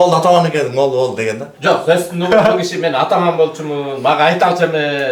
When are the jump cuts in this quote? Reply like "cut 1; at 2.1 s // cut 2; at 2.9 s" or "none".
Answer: cut 1; at 1.5 s